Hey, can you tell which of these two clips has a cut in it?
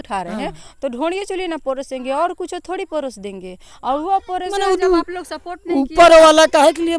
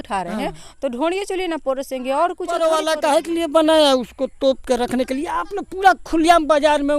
second; 1 cut; at 2.5 s

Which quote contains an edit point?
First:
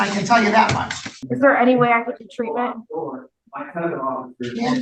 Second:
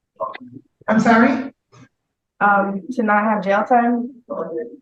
first; 1 cut; at 1.2 s

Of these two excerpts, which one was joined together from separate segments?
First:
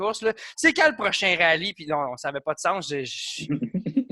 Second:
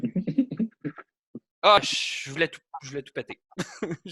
second; 1 cut; at 1.8 s

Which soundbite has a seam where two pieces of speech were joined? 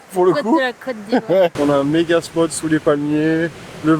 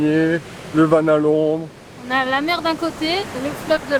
first; 1 cut; at 1.5 s

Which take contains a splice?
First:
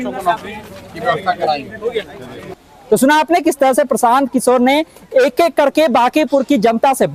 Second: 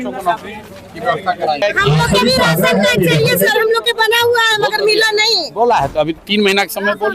second; 1 cut; at 1.6 s

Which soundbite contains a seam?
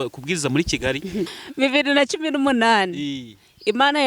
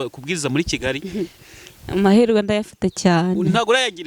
first; 1 cut; at 1.4 s

